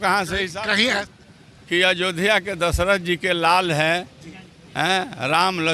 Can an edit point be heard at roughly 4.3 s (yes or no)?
no